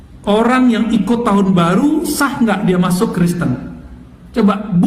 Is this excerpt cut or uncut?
uncut